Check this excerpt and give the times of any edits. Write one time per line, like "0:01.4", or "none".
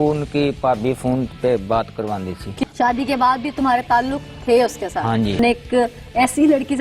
0:02.6
0:05.4